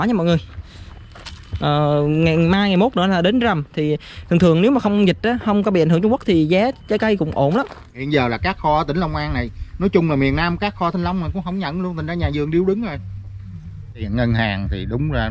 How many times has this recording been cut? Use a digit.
2